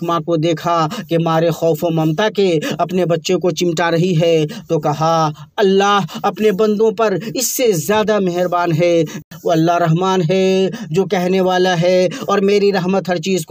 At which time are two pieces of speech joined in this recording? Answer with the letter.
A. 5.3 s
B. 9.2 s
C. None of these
B